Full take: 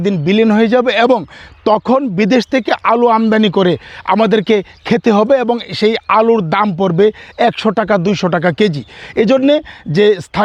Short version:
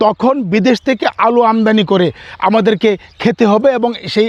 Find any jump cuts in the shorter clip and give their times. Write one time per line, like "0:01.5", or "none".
none